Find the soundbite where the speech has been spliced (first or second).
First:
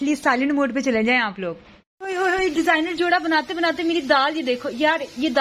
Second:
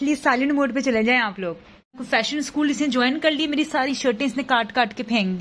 second